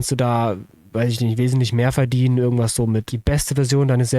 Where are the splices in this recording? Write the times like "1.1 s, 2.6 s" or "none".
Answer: 3.1 s